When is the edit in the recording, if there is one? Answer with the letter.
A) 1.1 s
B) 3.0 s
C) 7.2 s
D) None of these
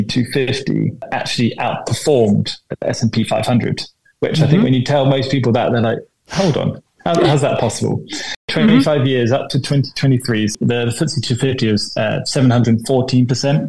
A